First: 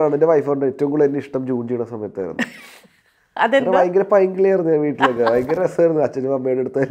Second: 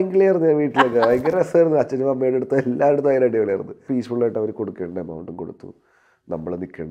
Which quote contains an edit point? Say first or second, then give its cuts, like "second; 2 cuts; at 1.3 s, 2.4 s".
second; 1 cut; at 3.7 s